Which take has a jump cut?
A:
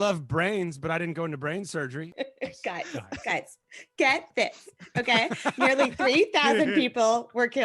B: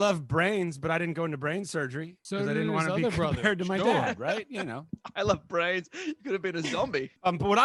A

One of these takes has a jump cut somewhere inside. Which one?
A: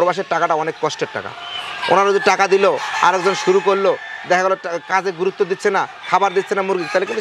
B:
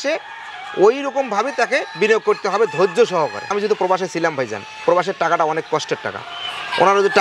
B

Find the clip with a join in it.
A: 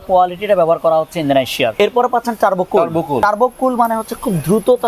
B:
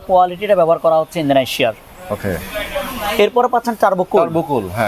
A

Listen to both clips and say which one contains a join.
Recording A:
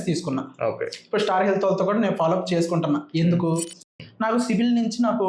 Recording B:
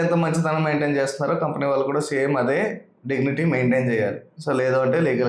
A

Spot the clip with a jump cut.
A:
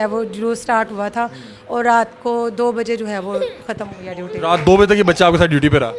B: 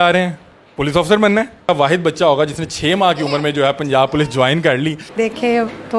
B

